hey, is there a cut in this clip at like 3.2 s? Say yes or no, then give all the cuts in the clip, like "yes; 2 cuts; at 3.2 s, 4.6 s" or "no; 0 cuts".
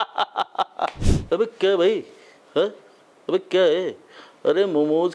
no; 1 cut; at 1.1 s